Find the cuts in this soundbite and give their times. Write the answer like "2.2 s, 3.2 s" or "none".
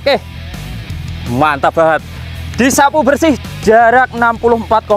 none